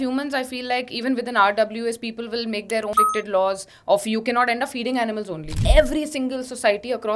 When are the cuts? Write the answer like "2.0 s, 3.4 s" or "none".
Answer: 2.9 s, 5.6 s